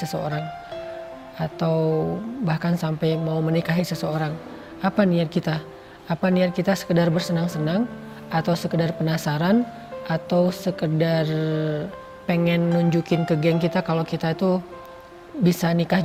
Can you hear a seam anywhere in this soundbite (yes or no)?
no